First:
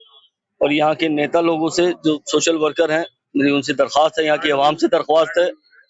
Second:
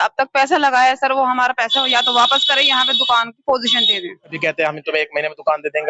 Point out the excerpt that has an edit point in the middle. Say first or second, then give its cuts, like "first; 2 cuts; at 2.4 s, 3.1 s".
second; 1 cut; at 4.3 s